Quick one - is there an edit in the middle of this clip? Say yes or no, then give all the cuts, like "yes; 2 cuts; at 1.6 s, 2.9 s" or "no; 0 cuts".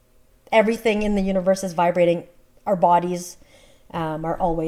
no; 0 cuts